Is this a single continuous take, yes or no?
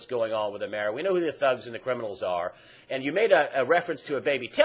no